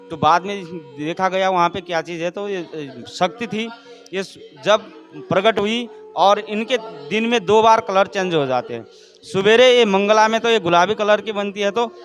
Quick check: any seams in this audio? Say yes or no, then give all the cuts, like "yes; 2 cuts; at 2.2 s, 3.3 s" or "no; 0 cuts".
no; 0 cuts